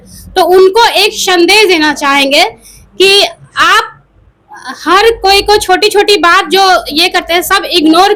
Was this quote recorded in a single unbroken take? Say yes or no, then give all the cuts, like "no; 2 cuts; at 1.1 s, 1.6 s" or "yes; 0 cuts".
yes; 0 cuts